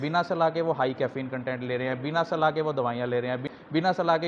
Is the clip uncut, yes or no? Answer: yes